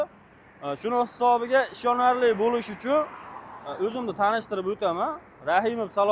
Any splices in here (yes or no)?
no